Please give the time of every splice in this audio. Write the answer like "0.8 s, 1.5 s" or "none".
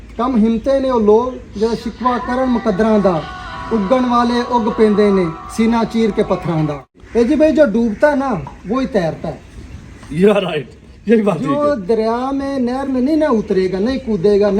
6.9 s